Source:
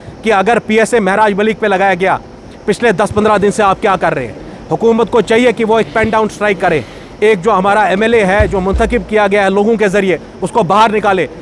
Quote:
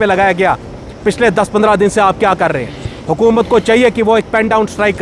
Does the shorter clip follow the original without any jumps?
yes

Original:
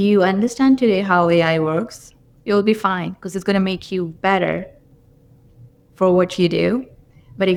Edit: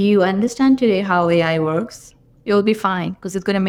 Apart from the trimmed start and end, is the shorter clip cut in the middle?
no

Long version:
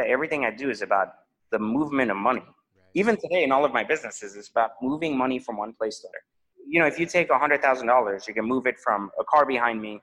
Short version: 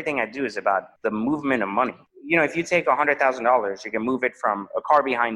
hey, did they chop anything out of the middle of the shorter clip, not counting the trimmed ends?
yes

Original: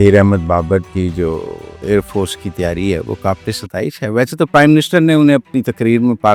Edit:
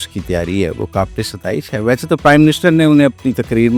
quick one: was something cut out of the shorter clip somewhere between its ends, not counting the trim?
no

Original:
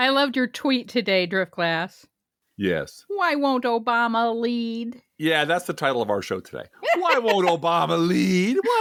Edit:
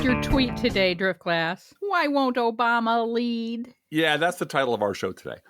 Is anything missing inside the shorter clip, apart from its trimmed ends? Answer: yes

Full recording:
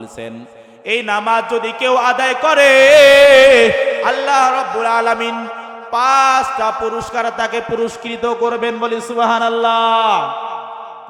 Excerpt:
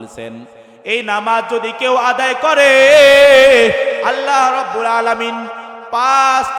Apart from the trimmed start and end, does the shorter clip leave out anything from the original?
no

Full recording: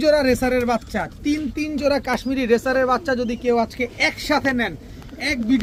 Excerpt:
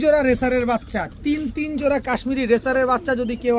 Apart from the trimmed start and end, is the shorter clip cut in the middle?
no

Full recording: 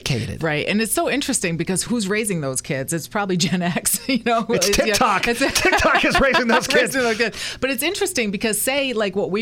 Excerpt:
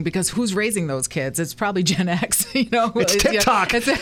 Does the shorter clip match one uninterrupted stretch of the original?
yes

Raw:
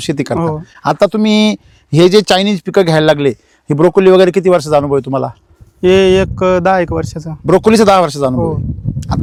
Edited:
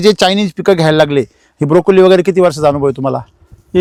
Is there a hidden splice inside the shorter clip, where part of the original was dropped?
no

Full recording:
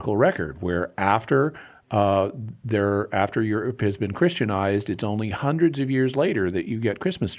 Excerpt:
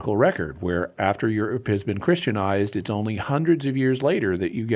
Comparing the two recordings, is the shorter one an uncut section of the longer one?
no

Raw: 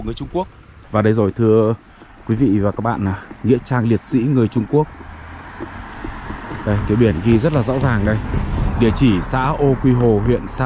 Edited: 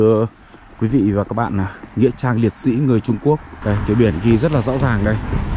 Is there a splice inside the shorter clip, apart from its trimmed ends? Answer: yes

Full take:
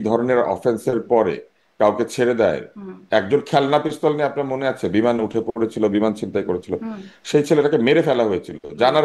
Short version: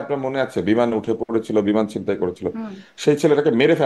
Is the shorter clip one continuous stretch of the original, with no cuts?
yes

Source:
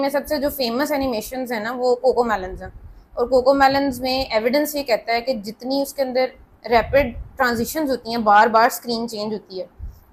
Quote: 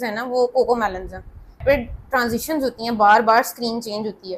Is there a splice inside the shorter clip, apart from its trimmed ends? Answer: yes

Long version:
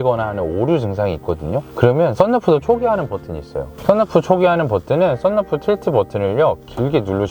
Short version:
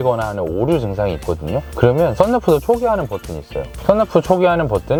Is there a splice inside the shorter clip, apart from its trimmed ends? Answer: no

